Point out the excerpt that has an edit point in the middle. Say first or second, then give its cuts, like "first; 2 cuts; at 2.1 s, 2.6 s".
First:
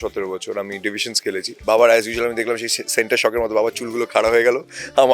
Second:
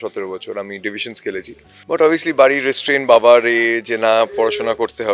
first; 1 cut; at 1.5 s